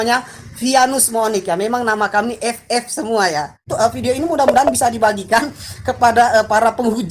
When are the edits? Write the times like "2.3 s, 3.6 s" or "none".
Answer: 3.7 s